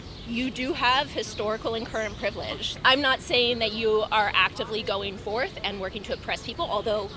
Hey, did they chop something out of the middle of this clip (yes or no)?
yes